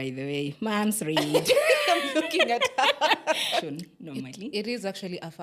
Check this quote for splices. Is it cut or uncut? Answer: cut